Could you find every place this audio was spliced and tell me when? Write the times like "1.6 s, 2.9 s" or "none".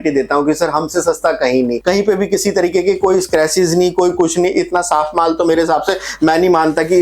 1.8 s